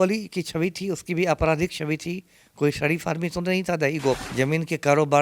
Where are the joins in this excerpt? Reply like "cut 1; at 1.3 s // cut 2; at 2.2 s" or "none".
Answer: cut 1; at 4.3 s